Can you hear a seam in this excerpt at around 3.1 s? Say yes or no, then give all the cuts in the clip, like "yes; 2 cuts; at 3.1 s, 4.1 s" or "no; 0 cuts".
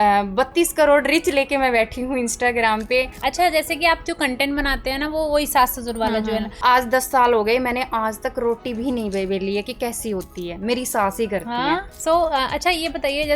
yes; 3 cuts; at 3.1 s, 6.5 s, 11.9 s